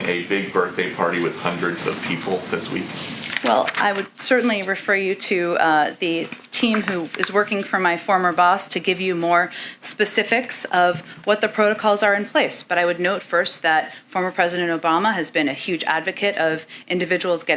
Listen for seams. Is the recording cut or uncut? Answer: uncut